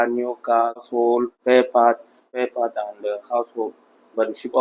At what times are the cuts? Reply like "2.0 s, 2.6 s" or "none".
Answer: 0.9 s, 2.3 s